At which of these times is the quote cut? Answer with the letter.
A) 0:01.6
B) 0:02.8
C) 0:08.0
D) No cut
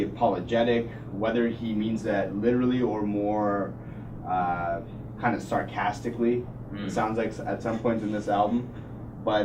B